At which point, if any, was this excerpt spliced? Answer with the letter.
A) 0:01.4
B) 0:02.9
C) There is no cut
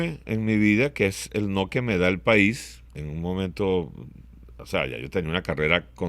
B